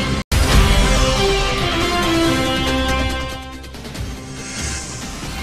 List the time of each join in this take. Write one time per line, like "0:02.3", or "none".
none

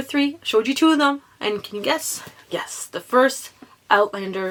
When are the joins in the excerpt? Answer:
none

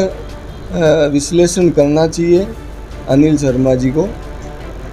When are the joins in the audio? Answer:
none

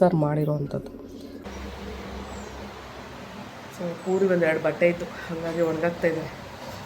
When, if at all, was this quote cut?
0:01.4

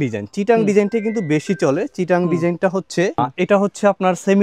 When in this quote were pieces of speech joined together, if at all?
none

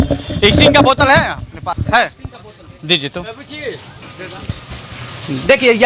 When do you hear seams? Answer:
0:01.8

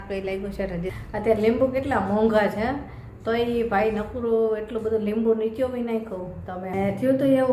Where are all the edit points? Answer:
0:00.9
0:06.7

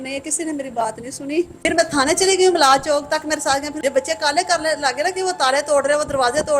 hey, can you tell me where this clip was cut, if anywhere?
0:01.6
0:03.8

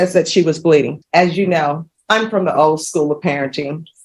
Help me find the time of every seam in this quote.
0:01.0
0:01.9

